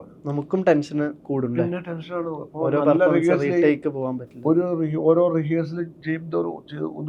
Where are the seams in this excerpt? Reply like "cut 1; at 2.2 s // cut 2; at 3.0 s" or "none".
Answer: none